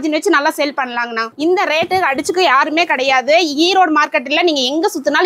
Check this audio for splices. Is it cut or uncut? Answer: cut